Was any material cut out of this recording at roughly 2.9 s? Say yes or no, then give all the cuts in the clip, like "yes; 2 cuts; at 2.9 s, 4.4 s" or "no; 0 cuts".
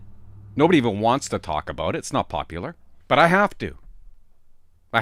yes; 1 cut; at 2.9 s